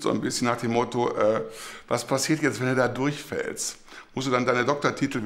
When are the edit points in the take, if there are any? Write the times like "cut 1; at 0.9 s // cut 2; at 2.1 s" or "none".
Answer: none

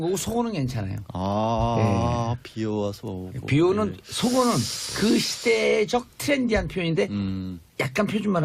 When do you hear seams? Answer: none

